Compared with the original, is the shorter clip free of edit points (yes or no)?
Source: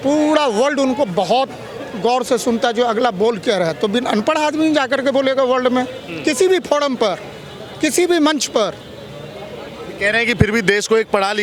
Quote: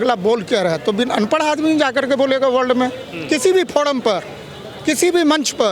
yes